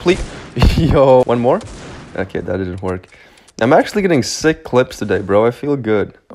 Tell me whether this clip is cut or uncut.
cut